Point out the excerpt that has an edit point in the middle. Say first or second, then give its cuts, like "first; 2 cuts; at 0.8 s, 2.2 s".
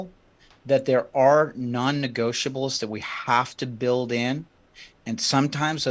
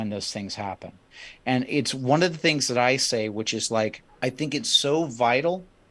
second; 1 cut; at 4.0 s